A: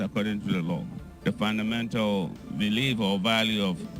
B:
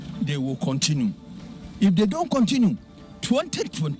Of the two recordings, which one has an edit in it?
A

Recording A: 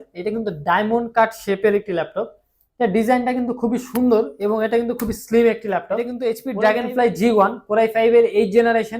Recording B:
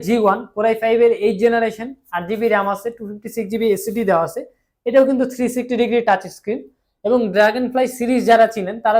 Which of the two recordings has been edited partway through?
A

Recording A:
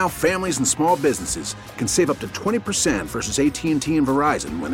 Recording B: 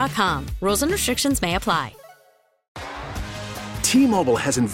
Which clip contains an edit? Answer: B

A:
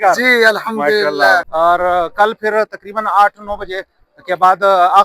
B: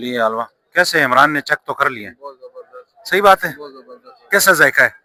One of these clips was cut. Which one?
A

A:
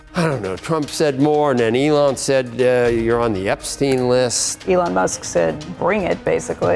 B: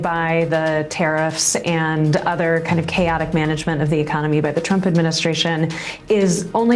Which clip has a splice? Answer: A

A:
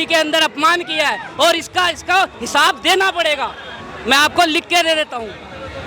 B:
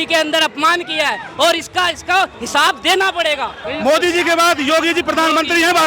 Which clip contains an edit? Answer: B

